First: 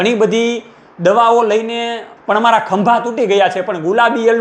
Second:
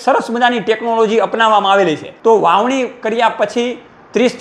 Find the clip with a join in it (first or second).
second